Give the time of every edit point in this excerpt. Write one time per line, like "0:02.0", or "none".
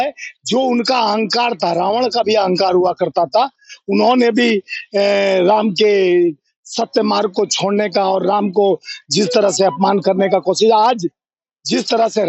none